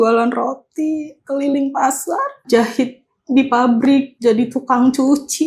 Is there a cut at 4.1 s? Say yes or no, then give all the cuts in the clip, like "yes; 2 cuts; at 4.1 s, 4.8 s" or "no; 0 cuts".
yes; 2 cuts; at 2.4 s, 4.1 s